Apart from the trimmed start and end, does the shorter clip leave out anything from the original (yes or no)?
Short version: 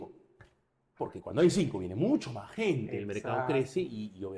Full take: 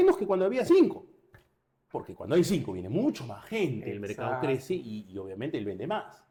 no